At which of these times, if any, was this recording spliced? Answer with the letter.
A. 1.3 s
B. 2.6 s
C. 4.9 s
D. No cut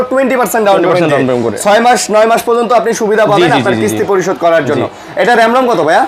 D